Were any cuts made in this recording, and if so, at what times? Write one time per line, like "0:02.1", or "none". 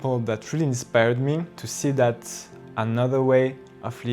0:01.6